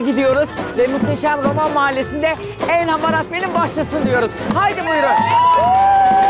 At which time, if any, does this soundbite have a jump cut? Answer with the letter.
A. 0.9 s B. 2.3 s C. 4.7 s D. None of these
D